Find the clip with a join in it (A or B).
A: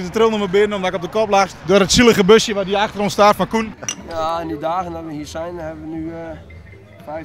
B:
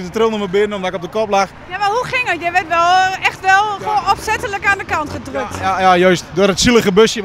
A